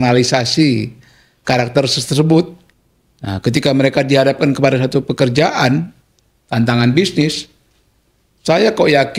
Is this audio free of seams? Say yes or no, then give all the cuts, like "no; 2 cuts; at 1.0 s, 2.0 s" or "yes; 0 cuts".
no; 1 cut; at 2.6 s